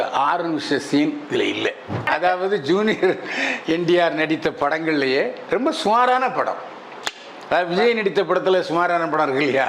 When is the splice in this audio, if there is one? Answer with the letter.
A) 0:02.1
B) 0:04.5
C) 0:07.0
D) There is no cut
A